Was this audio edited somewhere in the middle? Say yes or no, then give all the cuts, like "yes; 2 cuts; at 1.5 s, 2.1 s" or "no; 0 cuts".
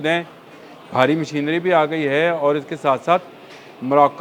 no; 0 cuts